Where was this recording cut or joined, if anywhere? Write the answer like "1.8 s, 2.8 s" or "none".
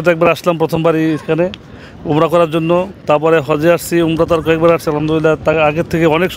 none